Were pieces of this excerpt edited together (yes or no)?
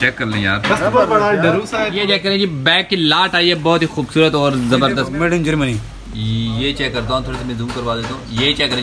yes